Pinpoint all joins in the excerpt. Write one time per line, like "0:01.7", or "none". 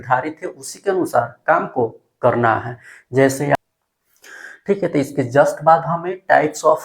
0:03.6